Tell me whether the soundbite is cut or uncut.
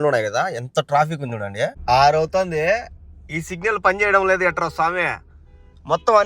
cut